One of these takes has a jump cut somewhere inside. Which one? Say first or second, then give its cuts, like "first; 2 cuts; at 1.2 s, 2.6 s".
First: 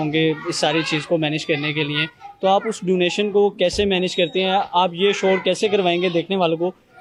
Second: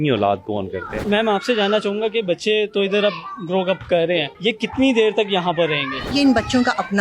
second; 3 cuts; at 1.0 s, 4.3 s, 6.1 s